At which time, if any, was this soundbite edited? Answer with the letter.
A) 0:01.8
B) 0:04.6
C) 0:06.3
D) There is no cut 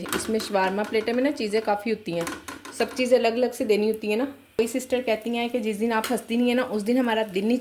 B